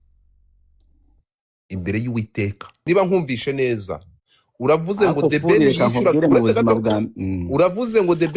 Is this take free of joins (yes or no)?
no